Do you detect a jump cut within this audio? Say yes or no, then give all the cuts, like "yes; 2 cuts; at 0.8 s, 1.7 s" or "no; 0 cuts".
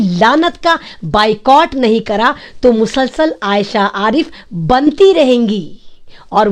no; 0 cuts